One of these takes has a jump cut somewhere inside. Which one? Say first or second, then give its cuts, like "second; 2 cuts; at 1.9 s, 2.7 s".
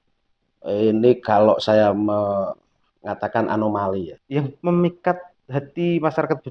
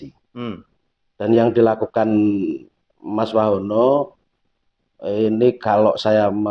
first; 1 cut; at 4.1 s